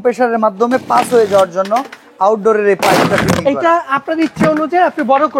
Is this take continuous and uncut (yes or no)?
yes